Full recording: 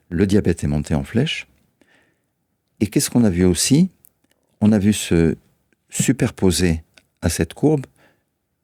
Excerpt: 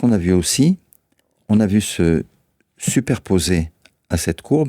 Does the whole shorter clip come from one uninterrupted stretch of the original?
yes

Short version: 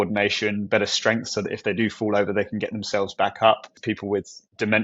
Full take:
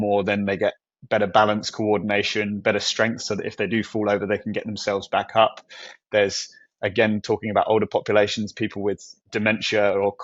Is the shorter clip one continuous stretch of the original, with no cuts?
no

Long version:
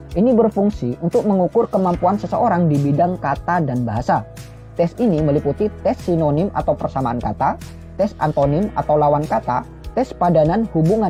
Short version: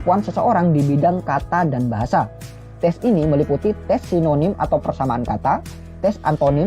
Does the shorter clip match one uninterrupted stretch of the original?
yes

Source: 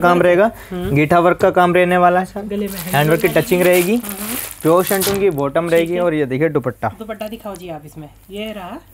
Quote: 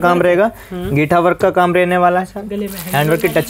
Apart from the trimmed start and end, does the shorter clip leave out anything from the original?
no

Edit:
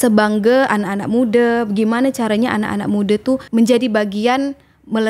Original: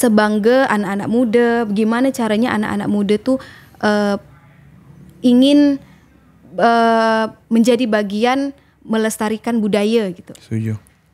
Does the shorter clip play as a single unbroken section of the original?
no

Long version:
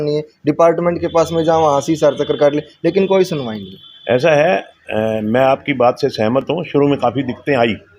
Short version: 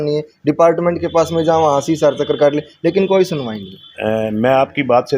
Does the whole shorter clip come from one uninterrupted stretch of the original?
no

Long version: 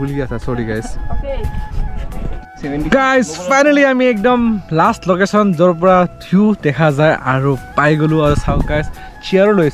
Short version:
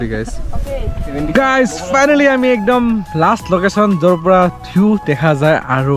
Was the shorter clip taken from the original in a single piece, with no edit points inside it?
no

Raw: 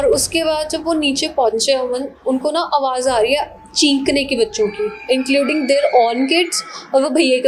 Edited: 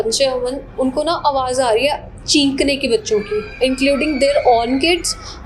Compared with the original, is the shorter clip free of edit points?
yes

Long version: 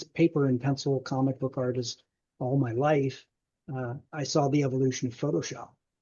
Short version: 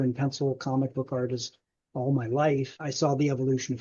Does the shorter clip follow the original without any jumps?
no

